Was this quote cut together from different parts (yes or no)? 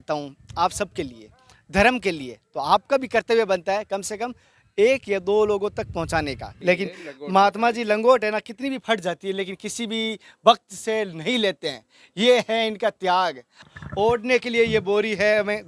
yes